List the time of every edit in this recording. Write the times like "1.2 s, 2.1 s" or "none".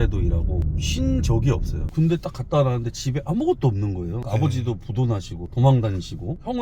1.8 s, 4.2 s, 5.4 s